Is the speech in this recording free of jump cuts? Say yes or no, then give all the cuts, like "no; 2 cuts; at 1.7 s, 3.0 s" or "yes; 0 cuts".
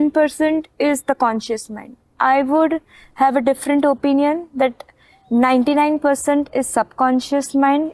yes; 0 cuts